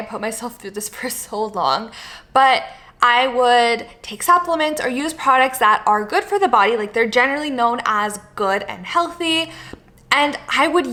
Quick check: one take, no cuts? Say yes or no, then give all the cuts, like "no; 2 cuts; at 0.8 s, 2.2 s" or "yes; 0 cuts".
yes; 0 cuts